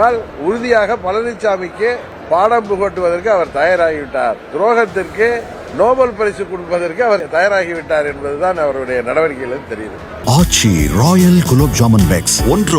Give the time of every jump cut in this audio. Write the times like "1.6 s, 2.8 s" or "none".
2.1 s, 5.6 s, 7.2 s, 10.1 s